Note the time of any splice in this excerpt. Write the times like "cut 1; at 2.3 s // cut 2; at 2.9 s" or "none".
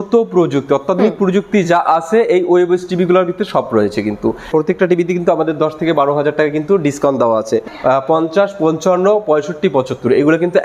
cut 1; at 4.5 s // cut 2; at 7.7 s